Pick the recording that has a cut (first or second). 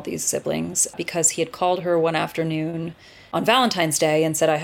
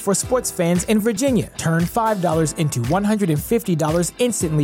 first